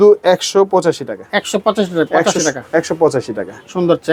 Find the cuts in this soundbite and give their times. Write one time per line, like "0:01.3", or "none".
none